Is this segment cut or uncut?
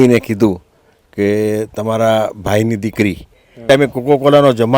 cut